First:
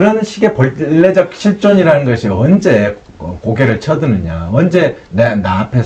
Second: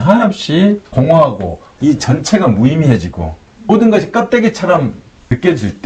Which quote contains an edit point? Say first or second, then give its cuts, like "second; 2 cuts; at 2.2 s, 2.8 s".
second; 1 cut; at 1.6 s